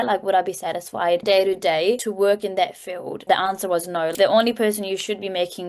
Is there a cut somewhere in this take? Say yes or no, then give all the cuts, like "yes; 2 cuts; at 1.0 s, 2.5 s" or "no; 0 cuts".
yes; 4 cuts; at 1.2 s, 2.1 s, 3.2 s, 4.1 s